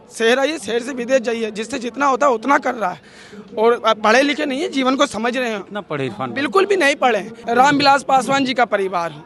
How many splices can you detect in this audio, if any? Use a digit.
1